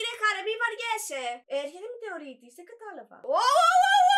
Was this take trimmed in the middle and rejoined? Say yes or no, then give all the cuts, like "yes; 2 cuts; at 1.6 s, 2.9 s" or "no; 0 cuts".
yes; 2 cuts; at 1.4 s, 3.1 s